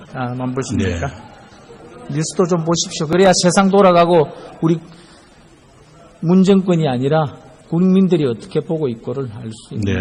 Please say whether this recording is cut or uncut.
uncut